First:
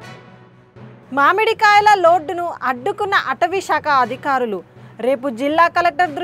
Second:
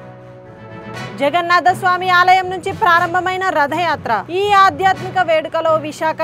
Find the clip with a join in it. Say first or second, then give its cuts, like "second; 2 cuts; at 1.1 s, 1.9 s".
second; 1 cut; at 1.0 s